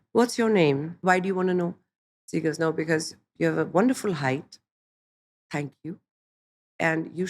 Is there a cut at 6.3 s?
no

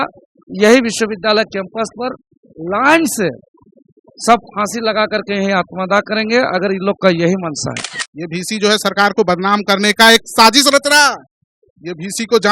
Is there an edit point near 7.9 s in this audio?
yes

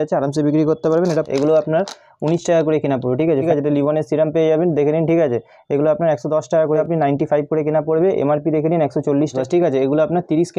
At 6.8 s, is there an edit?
yes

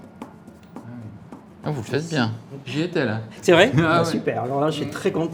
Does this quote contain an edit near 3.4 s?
no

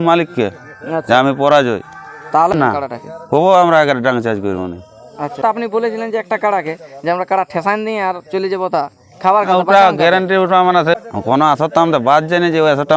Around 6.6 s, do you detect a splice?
no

